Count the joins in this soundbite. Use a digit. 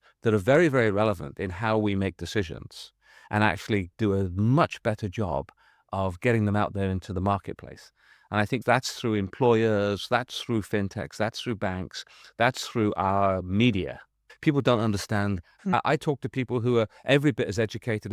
2